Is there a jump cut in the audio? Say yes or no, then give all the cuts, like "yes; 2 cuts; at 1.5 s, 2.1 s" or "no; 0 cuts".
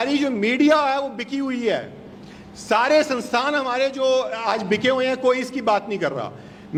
no; 0 cuts